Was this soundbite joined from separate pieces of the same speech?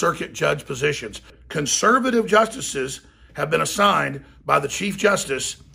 yes; 1 cut; at 1.3 s

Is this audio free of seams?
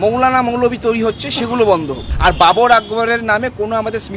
no; 1 cut; at 2.0 s

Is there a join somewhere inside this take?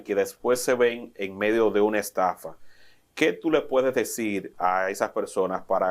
no; 0 cuts

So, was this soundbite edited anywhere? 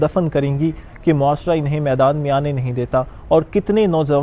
no; 0 cuts

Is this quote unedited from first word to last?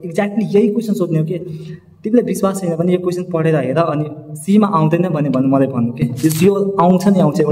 yes; 0 cuts

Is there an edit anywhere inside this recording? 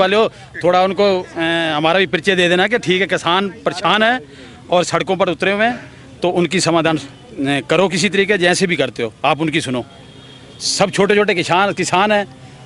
no; 0 cuts

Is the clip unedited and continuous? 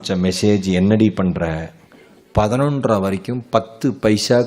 yes; 0 cuts

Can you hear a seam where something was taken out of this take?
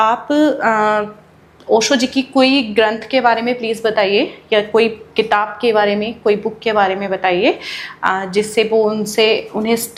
no; 0 cuts

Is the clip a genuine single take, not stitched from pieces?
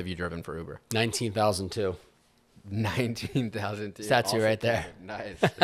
yes; 0 cuts

